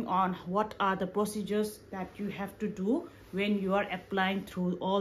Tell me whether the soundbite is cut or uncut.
uncut